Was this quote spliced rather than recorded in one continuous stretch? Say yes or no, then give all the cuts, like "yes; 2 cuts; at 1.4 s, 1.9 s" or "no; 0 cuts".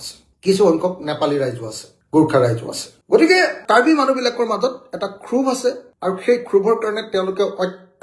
no; 0 cuts